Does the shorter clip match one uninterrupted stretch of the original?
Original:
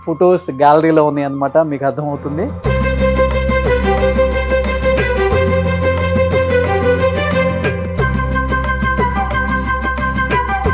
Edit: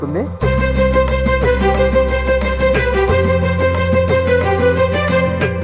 yes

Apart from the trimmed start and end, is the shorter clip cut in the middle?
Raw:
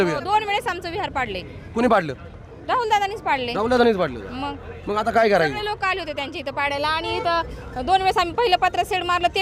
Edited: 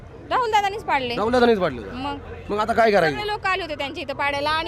no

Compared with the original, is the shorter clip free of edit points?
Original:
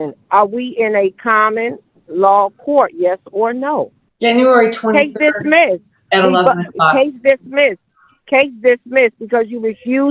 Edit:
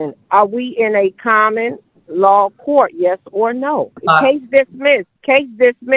no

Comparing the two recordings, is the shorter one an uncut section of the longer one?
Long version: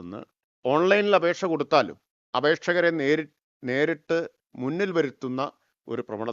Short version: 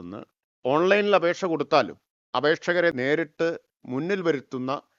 no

